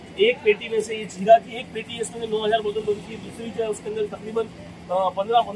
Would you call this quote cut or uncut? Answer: uncut